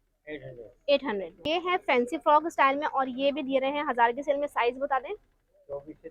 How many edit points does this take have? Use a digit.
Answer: 1